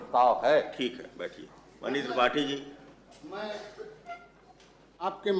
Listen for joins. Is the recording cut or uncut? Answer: uncut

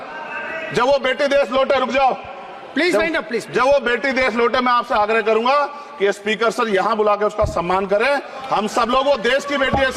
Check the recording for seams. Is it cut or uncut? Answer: uncut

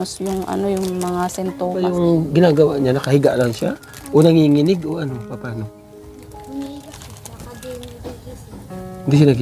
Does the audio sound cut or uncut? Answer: cut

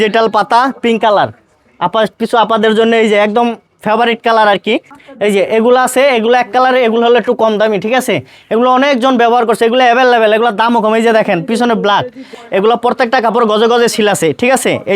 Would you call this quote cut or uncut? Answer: cut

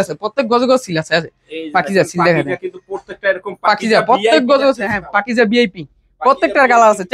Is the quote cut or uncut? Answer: uncut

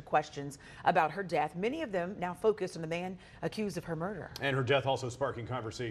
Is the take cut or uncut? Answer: uncut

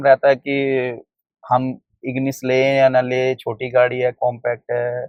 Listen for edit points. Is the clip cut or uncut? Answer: uncut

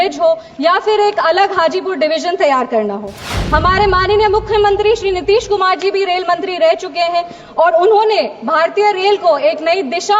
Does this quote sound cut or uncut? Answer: uncut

